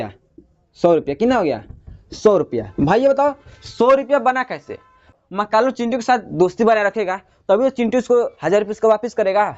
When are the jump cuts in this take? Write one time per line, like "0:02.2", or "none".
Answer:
0:05.1